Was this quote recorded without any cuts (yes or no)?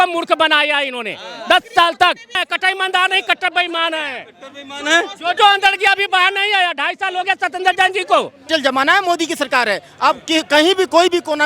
no